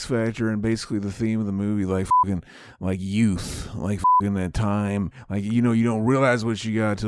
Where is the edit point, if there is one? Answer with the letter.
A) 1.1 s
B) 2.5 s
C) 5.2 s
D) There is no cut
C